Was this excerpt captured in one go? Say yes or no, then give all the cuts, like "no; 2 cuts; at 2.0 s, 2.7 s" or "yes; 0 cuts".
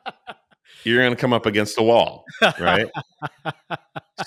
yes; 0 cuts